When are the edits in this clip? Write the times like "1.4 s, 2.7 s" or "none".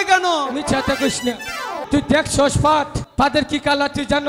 1.8 s, 3.0 s